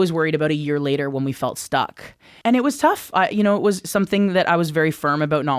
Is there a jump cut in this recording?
yes; 1 cut; at 2.3 s

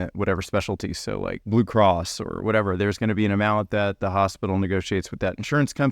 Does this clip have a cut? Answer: yes; 1 cut; at 1.4 s

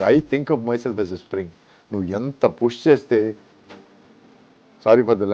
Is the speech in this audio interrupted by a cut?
no; 0 cuts

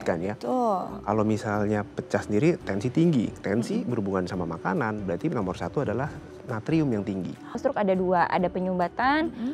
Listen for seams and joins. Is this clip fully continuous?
no; 1 cut; at 7.6 s

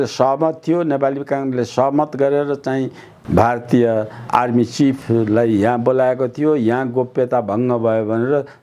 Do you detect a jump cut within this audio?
yes; 2 cuts; at 3.1 s, 4.2 s

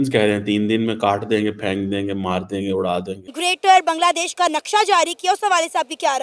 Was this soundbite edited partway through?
yes; 1 cut; at 3.2 s

